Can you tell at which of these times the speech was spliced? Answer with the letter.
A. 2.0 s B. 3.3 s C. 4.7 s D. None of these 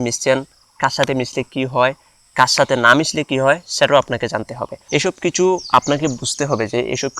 C